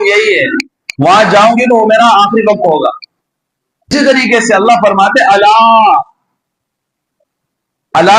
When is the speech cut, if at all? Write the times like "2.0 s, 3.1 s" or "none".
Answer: 3.9 s